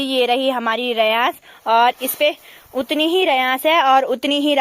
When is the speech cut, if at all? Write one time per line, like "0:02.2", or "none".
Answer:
none